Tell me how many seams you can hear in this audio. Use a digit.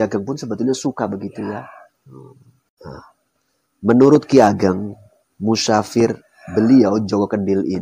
1